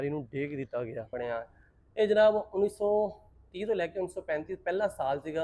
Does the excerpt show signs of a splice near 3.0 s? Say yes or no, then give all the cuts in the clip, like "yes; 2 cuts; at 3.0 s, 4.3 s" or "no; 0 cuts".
no; 1 cut; at 1.1 s